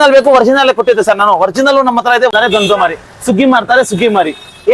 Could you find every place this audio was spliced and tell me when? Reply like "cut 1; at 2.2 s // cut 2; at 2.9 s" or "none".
cut 1; at 2.3 s